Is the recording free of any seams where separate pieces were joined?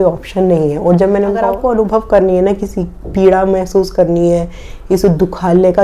no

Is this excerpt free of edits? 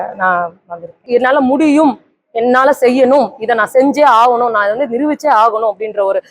no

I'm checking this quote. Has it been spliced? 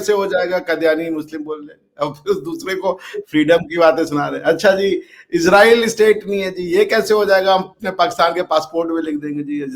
no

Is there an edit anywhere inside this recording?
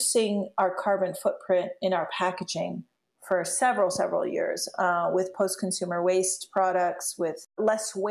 no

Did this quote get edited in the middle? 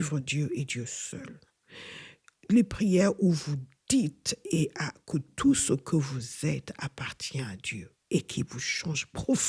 no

